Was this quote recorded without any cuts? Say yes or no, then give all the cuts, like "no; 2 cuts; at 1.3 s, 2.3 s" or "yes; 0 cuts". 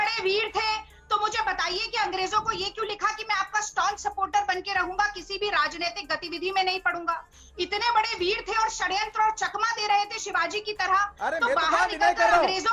yes; 0 cuts